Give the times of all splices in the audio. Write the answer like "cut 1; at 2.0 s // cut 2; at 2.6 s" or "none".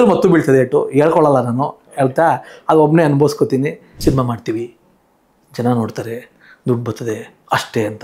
cut 1; at 3.8 s